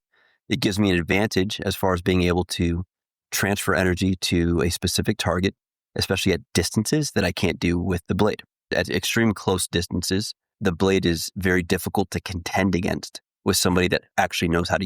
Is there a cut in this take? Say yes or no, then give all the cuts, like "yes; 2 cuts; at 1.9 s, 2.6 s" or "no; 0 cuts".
yes; 2 cuts; at 8.7 s, 10.4 s